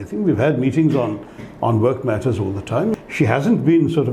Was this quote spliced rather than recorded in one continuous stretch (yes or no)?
yes